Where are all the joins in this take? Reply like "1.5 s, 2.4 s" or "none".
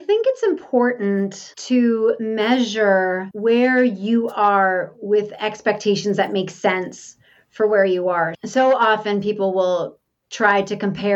1.5 s, 2.2 s, 3.3 s